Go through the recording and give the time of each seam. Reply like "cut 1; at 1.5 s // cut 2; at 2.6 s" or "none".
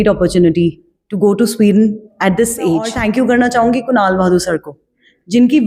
cut 1; at 3.0 s